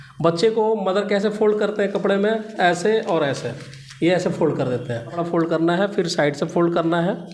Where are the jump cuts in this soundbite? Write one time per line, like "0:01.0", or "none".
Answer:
0:05.2